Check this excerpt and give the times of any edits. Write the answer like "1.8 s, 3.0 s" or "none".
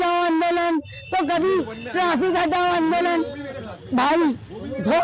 none